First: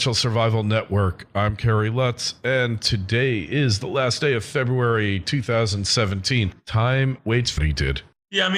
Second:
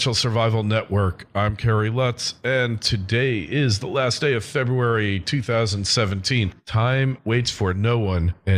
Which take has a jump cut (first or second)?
second